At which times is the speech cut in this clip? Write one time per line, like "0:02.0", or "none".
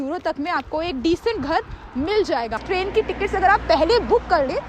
0:02.6